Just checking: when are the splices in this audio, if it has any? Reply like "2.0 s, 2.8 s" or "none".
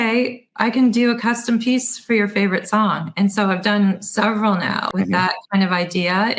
4.9 s